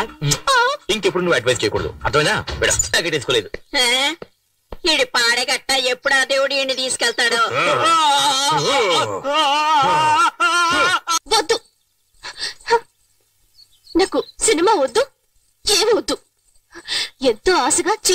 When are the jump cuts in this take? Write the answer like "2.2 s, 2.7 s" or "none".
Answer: 11.1 s